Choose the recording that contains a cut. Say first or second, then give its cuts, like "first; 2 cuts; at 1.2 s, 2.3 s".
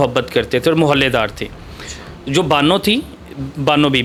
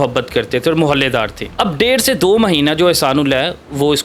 second; 1 cut; at 1.4 s